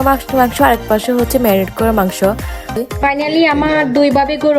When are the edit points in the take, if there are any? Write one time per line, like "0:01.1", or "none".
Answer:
0:02.7